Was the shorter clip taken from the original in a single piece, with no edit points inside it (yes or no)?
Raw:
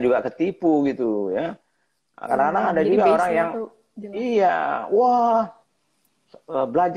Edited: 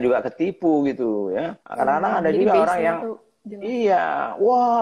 no